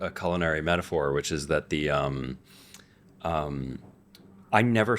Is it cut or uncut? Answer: uncut